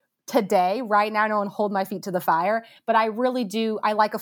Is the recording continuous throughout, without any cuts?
yes; 0 cuts

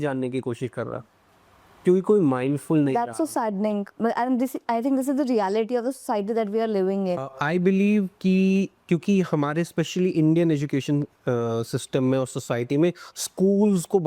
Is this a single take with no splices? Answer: no; 1 cut; at 7.3 s

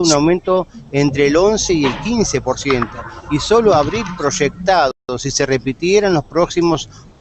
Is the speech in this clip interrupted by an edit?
no; 0 cuts

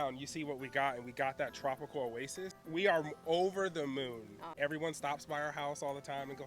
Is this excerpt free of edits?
no; 2 cuts; at 2.6 s, 4.5 s

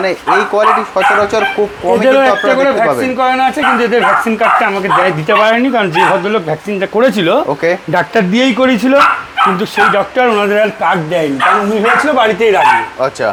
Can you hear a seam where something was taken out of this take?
no; 0 cuts

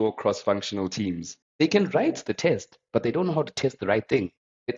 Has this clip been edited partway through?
yes; 1 cut; at 1.4 s

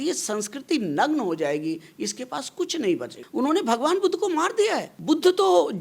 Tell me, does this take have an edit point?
yes; 2 cuts; at 3.2 s, 4.9 s

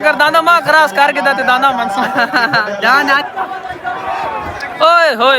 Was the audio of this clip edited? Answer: yes; 1 cut; at 3.1 s

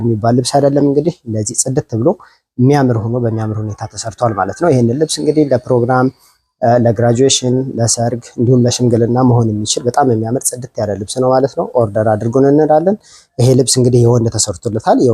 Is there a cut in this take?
no; 0 cuts

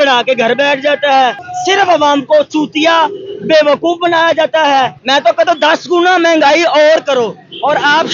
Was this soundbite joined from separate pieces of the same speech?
yes; 2 cuts; at 1.5 s, 5.0 s

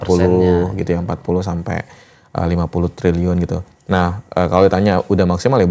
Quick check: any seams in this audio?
no; 0 cuts

